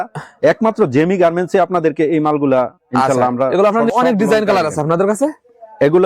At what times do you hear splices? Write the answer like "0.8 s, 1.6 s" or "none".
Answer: 3.9 s